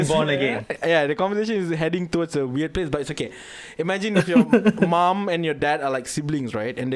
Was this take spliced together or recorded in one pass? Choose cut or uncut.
uncut